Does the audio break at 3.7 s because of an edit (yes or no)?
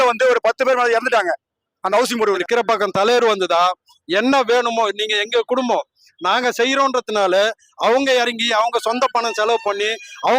no